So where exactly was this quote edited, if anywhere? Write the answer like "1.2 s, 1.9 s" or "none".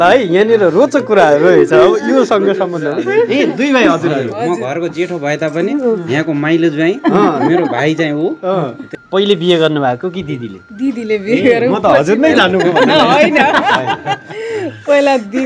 9.0 s

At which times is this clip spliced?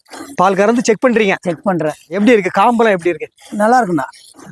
none

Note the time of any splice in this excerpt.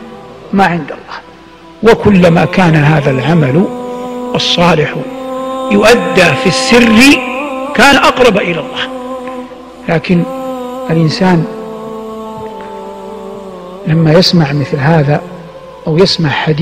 15.7 s

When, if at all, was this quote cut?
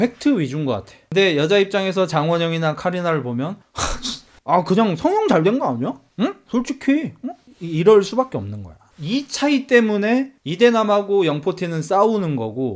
0.9 s

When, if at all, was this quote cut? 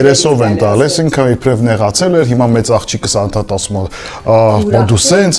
none

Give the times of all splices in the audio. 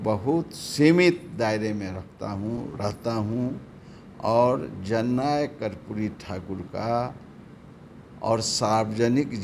none

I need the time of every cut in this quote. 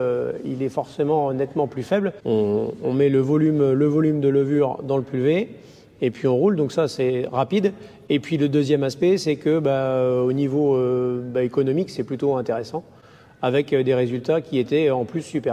2.2 s

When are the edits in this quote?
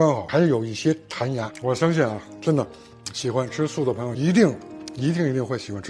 none

